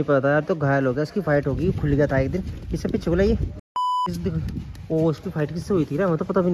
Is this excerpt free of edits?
no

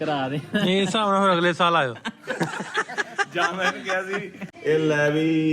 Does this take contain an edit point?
yes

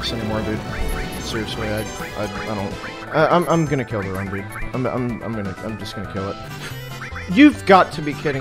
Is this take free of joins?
no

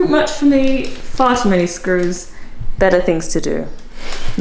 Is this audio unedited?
yes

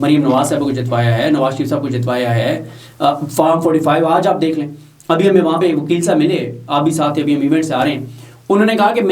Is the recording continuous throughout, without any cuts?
yes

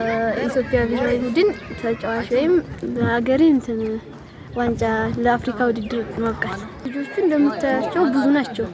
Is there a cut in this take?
yes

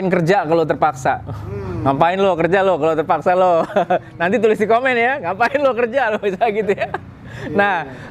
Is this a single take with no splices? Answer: yes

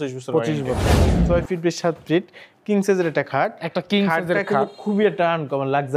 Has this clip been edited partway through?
yes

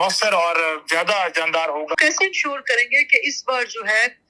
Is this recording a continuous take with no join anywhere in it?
no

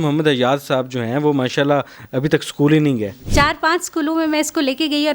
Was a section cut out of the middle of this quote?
yes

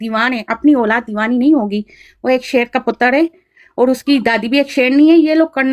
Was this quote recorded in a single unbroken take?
yes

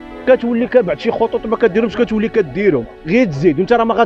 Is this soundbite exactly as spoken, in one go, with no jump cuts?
no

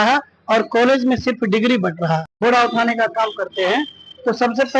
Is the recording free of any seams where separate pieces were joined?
no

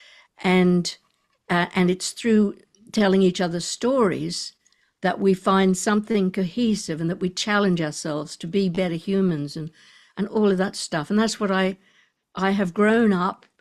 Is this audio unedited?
yes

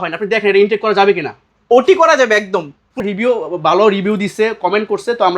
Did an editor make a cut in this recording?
yes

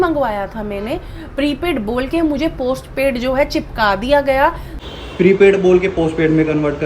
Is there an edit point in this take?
yes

